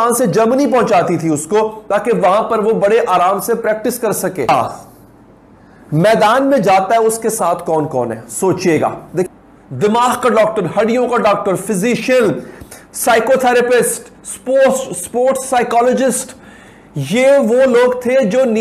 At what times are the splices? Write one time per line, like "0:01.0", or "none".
0:09.2